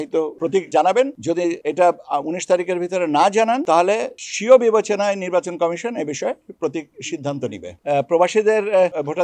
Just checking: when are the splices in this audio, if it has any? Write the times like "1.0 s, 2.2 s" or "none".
7.7 s